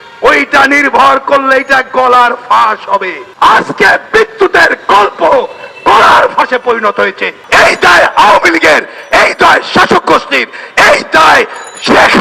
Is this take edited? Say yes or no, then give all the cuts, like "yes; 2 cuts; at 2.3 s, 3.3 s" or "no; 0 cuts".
yes; 2 cuts; at 3.2 s, 7.3 s